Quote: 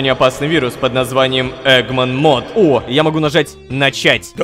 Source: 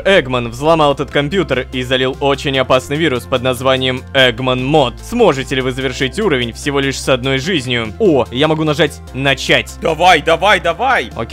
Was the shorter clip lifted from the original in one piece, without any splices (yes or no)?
no